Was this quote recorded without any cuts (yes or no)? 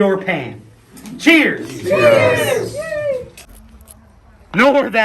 no